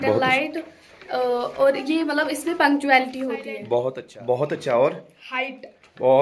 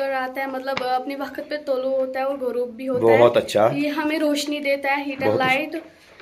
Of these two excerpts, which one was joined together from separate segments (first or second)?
first